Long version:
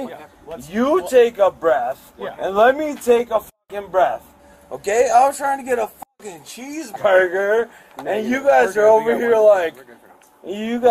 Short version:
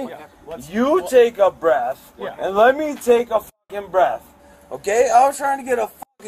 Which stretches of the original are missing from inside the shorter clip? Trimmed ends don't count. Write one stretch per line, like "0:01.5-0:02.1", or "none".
none